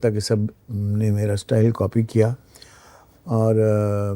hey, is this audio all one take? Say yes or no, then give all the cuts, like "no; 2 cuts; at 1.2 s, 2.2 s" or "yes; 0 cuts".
yes; 0 cuts